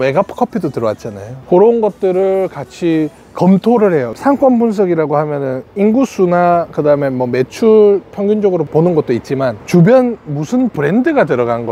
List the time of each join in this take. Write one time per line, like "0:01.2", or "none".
none